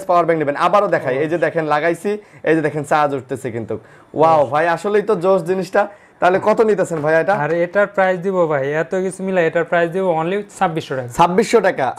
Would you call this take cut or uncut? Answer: uncut